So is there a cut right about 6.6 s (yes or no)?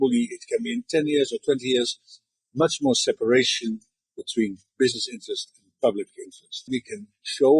yes